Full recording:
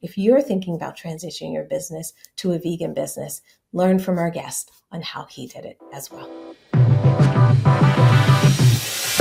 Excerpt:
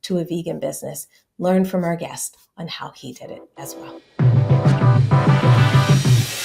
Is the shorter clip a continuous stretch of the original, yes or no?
no